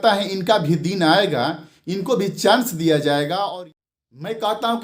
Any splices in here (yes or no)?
yes